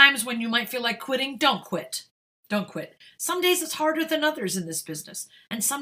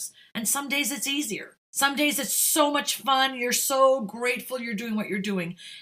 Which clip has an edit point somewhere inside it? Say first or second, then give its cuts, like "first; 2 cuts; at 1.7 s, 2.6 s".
second; 1 cut; at 1.6 s